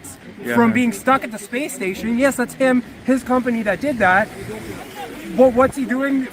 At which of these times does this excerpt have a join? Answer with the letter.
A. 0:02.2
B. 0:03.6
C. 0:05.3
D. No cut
C